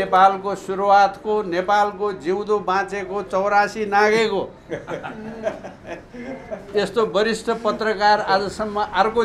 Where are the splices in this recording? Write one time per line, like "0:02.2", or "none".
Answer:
none